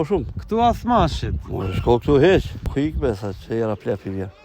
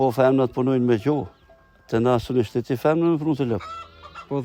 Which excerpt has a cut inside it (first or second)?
first